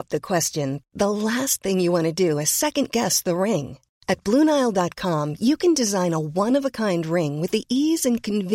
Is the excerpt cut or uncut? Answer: uncut